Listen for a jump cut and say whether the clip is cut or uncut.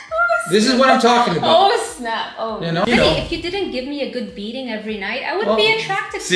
cut